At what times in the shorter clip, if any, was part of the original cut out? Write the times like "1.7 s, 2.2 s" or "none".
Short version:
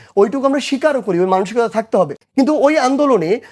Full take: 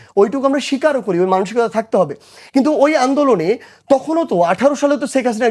2.2 s